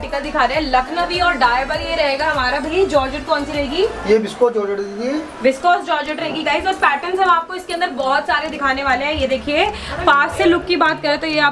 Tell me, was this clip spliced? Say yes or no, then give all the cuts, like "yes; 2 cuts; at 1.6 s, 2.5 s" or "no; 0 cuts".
no; 0 cuts